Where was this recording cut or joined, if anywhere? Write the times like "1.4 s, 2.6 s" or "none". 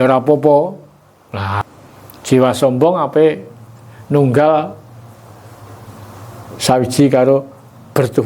1.6 s